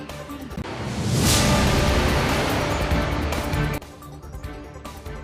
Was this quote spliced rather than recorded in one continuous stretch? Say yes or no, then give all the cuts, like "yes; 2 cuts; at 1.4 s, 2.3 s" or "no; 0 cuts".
no; 0 cuts